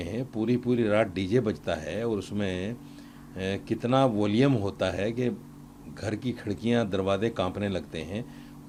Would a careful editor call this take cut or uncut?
uncut